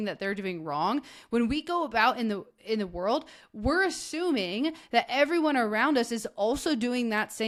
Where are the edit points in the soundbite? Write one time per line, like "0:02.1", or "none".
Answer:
none